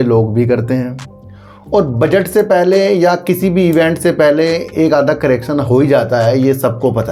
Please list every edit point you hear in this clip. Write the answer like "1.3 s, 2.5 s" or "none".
none

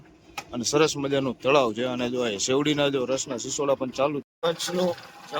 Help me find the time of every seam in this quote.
4.2 s

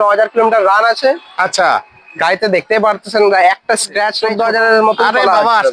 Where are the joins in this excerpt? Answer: 4.2 s

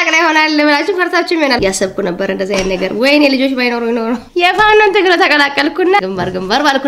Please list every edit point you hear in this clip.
1.6 s, 4.2 s, 6.0 s

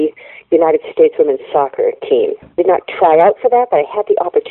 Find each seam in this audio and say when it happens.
2.6 s

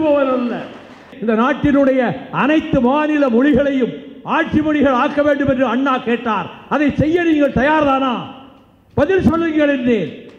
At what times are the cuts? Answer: 1.1 s

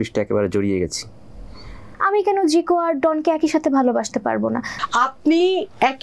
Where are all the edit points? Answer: 1.9 s, 4.7 s

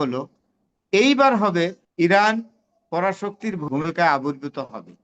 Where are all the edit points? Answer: 1.8 s, 3.6 s

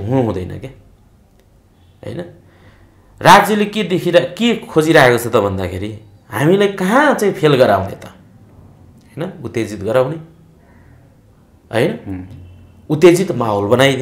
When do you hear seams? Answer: none

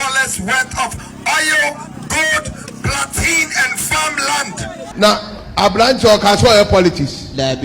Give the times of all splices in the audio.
4.9 s

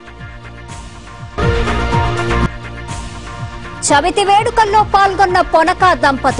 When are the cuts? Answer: 1.3 s

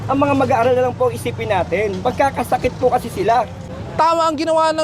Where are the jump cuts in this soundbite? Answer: 3.6 s

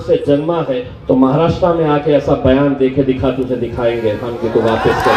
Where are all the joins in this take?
0.9 s

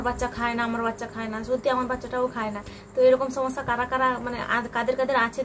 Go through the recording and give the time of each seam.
none

